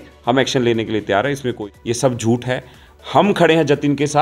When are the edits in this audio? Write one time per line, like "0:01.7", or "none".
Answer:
0:02.0